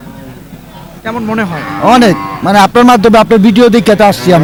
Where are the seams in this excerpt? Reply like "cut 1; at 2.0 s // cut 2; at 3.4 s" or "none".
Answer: none